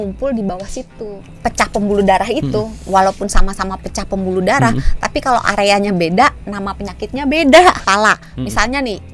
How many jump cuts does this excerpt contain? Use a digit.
2